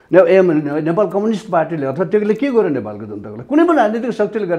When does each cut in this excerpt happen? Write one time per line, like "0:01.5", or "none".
none